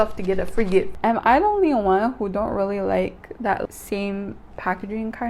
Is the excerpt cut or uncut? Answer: cut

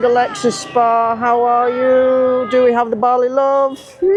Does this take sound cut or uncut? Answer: uncut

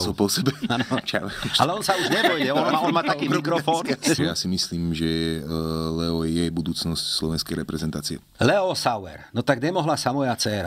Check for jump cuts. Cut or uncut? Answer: cut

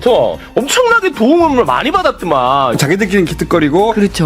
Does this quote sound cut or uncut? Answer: cut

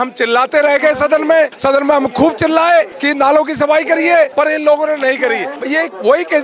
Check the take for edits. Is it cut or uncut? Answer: cut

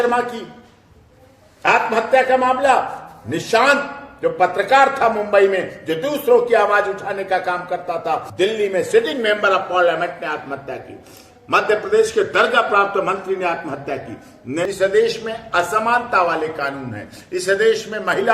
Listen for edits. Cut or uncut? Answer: cut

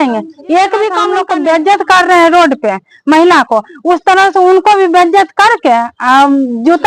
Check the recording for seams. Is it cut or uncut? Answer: cut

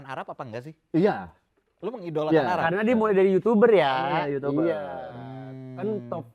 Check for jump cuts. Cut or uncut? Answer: uncut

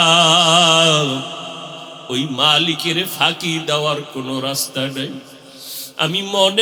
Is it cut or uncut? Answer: uncut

